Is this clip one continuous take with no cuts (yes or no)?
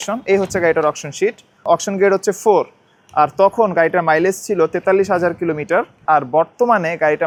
yes